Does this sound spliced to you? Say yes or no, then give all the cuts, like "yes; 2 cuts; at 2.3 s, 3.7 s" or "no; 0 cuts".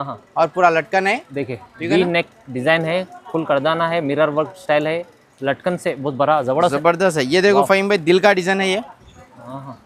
no; 0 cuts